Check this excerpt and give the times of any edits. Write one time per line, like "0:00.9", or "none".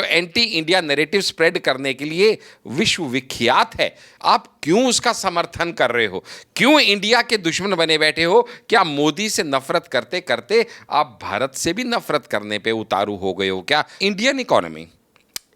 0:13.9